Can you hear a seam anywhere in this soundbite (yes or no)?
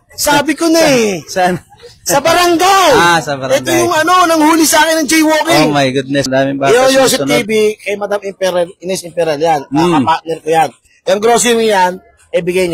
yes